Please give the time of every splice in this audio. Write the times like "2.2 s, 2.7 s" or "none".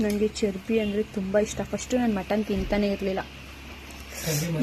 none

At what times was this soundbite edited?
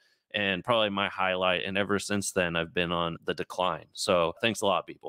none

